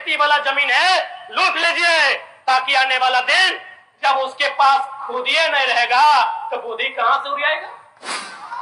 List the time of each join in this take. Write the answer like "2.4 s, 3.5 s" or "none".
none